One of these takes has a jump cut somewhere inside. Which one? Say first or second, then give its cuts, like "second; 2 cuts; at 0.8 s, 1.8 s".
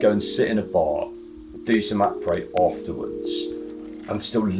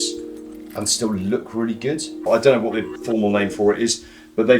second; 1 cut; at 2.3 s